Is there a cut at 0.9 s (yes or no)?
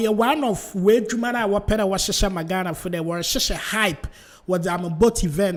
no